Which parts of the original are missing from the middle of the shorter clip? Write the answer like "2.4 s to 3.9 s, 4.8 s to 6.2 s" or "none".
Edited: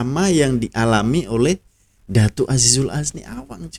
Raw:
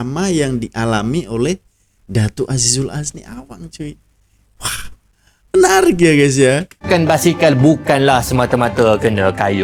none